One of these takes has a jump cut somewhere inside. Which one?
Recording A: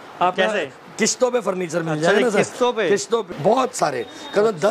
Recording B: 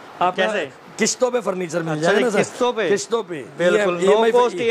A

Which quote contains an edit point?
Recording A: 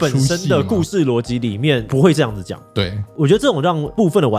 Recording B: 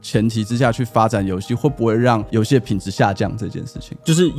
A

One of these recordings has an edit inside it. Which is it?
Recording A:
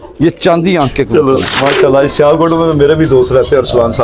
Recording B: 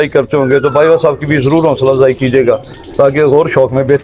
A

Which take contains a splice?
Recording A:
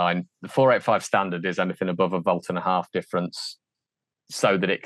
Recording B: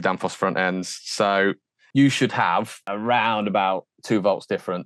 B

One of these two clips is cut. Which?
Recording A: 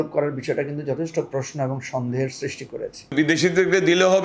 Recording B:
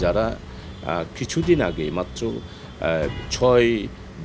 A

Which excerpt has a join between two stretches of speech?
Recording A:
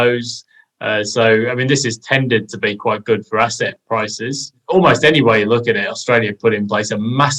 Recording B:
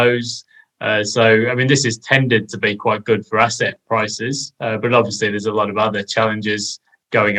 A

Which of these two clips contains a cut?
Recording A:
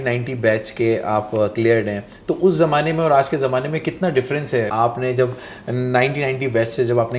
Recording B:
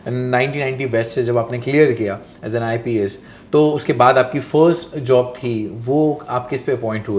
A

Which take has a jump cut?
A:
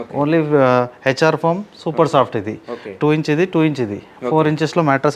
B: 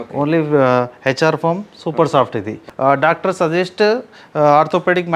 B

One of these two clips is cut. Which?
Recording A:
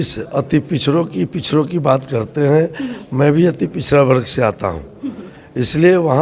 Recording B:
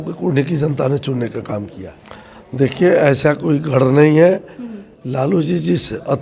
B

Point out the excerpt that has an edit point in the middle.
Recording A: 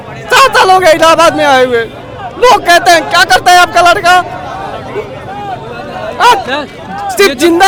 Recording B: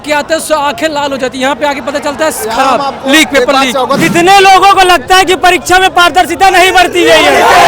B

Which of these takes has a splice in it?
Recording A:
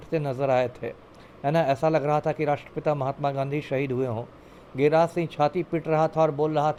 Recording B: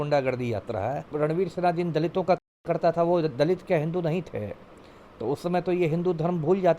B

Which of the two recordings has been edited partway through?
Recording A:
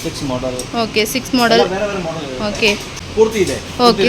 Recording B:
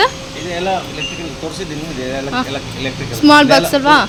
A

